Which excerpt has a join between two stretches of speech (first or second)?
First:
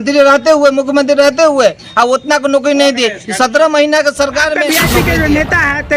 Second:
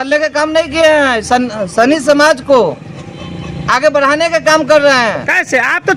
first